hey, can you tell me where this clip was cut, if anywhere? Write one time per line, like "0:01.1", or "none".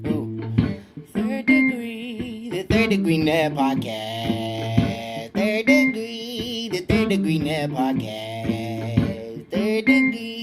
none